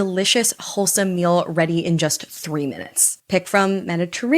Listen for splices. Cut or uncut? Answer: cut